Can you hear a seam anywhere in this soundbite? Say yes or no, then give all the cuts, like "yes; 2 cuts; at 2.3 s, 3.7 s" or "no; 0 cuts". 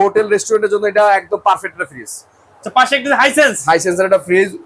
no; 0 cuts